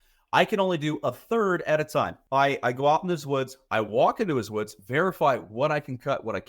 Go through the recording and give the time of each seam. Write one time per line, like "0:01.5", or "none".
0:02.2